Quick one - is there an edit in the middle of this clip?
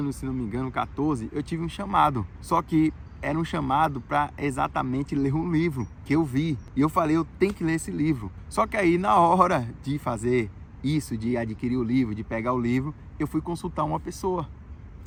no; 0 cuts

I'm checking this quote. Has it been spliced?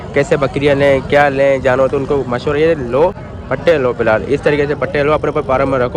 no; 0 cuts

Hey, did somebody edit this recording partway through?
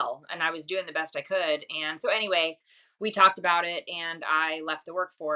no; 0 cuts

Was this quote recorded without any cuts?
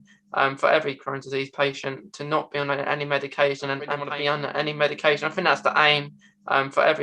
no; 1 cut; at 4.0 s

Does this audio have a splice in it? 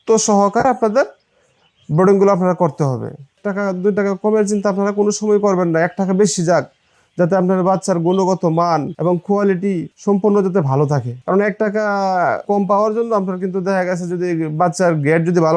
yes; 5 cuts; at 3.4 s, 8.8 s, 9.9 s, 11.1 s, 12.4 s

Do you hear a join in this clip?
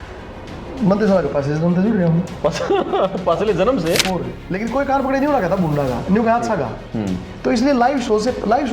yes; 1 cut; at 4.4 s

